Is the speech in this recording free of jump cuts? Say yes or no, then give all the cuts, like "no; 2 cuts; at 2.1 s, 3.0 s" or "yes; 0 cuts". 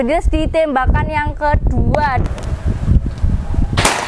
no; 1 cut; at 2.3 s